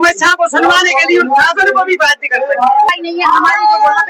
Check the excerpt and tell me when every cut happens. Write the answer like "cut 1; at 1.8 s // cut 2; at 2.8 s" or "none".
cut 1; at 2.9 s